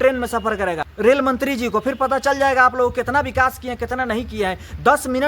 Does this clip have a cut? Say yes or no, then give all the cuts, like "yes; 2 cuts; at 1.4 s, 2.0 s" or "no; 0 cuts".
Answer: yes; 1 cut; at 1.0 s